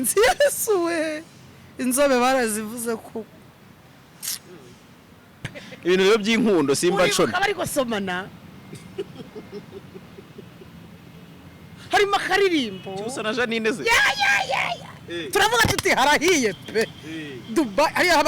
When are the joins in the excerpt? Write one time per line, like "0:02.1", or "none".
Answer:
0:05.6